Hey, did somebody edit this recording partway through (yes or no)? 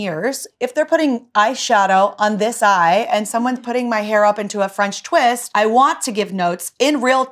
no